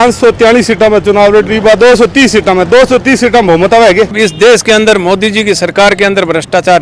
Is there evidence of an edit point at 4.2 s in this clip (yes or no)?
yes